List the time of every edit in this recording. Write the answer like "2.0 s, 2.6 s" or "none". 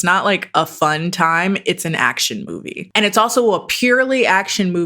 2.8 s